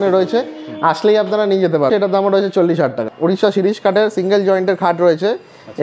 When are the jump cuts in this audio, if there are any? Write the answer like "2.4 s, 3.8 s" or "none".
1.9 s, 3.1 s

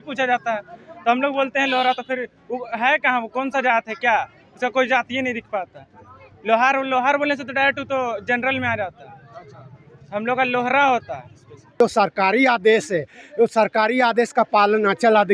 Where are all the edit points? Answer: 11.8 s

